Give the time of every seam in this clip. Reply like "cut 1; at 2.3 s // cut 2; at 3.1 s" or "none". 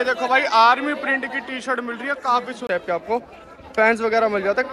cut 1; at 2.6 s